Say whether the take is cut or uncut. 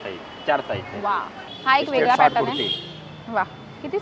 uncut